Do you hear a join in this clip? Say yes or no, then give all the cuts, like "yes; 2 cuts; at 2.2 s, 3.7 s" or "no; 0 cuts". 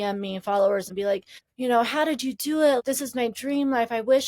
yes; 2 cuts; at 1.0 s, 2.8 s